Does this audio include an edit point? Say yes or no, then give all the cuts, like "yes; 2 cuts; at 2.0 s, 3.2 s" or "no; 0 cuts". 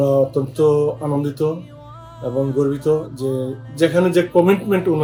no; 0 cuts